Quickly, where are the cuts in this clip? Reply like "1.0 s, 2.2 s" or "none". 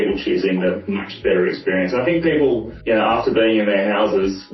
2.7 s